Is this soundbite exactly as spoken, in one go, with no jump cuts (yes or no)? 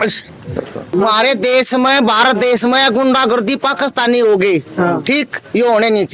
no